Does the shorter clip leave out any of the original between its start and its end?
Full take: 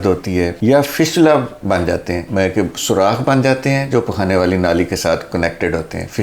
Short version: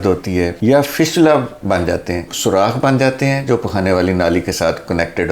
yes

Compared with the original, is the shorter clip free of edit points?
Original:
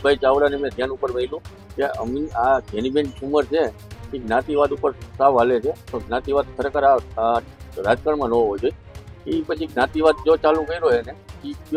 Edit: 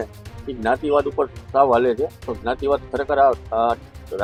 yes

